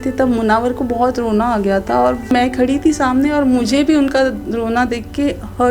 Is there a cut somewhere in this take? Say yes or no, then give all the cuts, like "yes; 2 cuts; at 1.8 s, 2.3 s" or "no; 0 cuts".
yes; 1 cut; at 2.3 s